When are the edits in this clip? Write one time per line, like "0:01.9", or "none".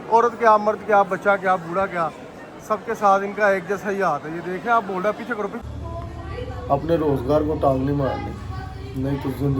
0:05.6